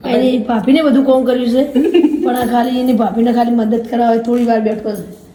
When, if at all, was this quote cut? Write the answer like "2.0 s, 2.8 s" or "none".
none

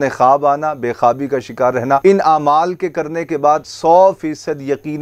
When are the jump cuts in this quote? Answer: 2.0 s

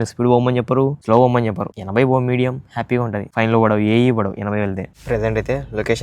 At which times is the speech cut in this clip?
1.0 s, 1.7 s, 3.2 s, 4.9 s

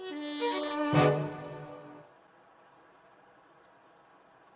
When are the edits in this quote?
2.1 s

